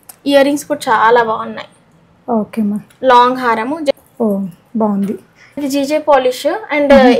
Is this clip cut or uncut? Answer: cut